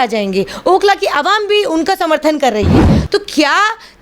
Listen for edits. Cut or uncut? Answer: cut